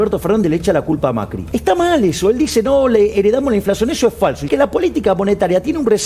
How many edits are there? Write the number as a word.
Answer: two